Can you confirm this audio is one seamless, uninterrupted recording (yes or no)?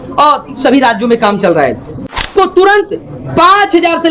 no